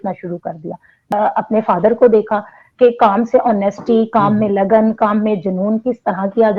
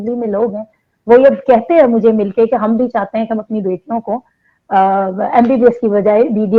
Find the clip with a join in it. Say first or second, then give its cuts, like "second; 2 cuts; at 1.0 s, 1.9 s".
first; 1 cut; at 0.9 s